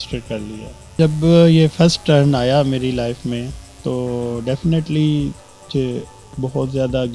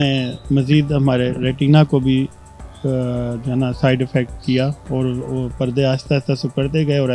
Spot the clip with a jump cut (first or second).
first